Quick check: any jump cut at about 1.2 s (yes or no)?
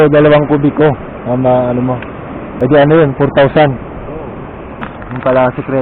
no